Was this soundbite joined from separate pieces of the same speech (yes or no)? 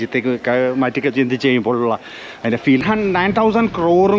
yes